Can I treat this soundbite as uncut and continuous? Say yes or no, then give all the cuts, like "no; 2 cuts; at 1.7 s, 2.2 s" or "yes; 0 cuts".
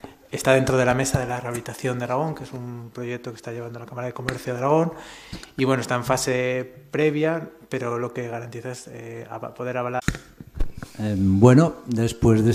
yes; 0 cuts